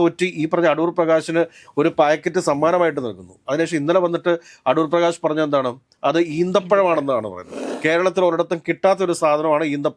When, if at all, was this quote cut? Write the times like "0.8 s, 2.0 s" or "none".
7.7 s